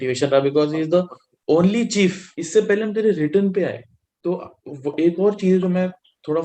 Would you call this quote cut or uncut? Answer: cut